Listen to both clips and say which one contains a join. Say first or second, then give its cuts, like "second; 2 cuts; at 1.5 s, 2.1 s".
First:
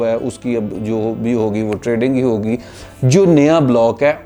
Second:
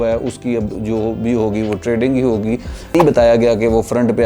second; 1 cut; at 2.9 s